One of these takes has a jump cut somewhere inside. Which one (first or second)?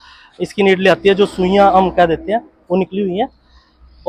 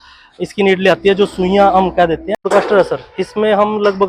second